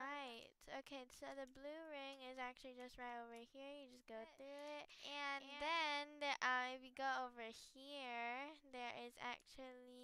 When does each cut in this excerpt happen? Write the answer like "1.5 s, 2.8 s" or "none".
5.0 s